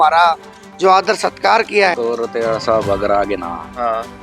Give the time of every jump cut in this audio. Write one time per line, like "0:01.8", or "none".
0:01.9